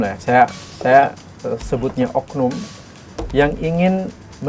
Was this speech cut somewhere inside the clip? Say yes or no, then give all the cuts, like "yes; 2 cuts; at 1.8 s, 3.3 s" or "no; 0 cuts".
no; 0 cuts